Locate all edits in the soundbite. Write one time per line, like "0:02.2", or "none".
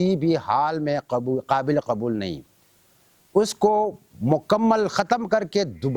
none